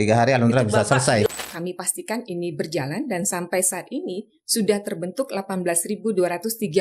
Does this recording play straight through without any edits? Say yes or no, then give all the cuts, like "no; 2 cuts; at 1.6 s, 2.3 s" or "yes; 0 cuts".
no; 1 cut; at 1.3 s